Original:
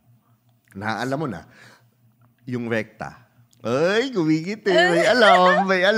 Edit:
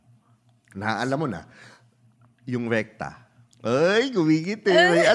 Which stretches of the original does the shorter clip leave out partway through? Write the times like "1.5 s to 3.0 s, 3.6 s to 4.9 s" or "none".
none